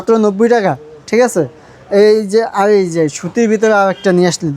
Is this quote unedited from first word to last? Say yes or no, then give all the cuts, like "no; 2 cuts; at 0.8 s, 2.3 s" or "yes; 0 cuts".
yes; 0 cuts